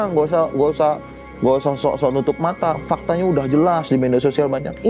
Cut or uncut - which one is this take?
uncut